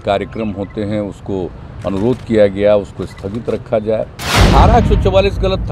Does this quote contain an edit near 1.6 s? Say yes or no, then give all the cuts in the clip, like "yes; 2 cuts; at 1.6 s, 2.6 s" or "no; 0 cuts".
no; 1 cut; at 4.4 s